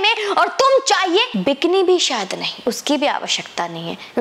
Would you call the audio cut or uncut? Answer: cut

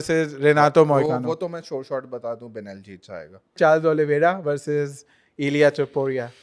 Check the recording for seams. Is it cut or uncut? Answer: cut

